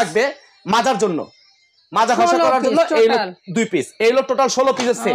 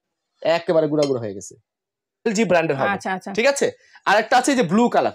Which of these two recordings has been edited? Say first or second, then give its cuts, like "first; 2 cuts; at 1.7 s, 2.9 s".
second; 1 cut; at 2.3 s